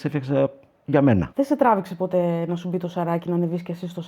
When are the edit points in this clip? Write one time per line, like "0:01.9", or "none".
0:01.3